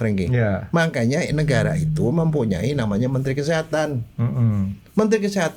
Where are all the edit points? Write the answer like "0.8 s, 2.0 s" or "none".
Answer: none